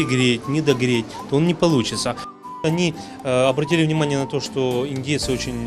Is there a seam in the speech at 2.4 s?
yes; 1 cut; at 2.4 s

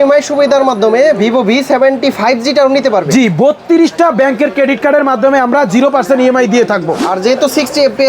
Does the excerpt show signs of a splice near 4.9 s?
no; 1 cut; at 7.0 s

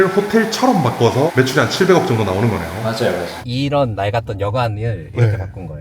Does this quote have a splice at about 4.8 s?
no; 2 cuts; at 1.3 s, 3.4 s

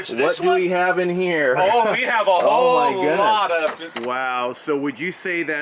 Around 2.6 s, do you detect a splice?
no; 1 cut; at 3.9 s

